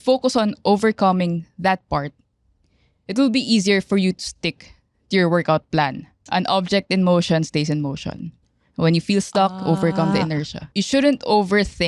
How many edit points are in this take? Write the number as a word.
two